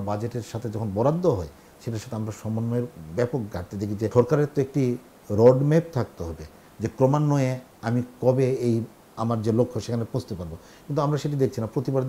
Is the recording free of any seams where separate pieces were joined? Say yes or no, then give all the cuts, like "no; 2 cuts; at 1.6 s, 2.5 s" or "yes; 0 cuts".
yes; 0 cuts